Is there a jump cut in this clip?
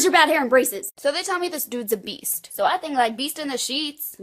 yes; 1 cut; at 1.0 s

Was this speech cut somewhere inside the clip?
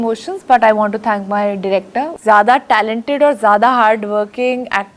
yes; 1 cut; at 2.1 s

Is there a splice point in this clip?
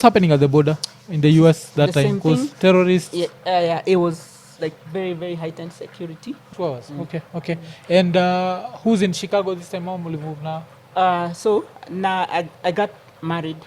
yes; 1 cut; at 6.4 s

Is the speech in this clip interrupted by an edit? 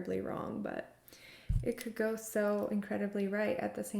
no; 0 cuts

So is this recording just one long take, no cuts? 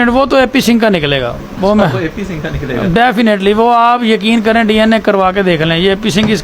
yes; 0 cuts

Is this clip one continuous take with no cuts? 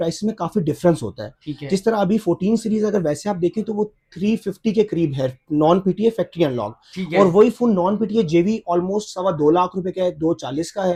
yes; 0 cuts

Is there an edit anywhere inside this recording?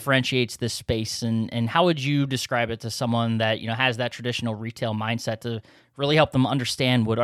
no; 0 cuts

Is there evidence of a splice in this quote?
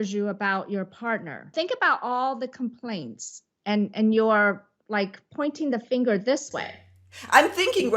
yes; 1 cut; at 1.5 s

